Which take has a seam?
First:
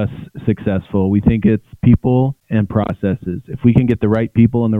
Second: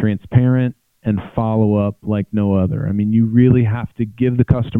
first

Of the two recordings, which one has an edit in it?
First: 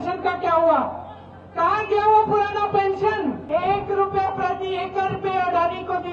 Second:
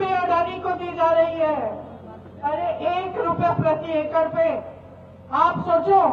first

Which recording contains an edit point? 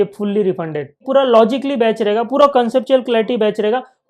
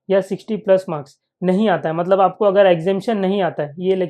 first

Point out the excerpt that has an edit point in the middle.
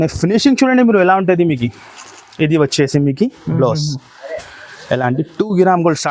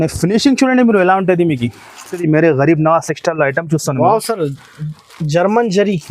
second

